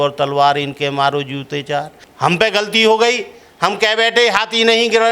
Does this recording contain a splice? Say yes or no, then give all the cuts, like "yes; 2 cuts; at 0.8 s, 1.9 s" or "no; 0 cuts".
yes; 1 cut; at 2.0 s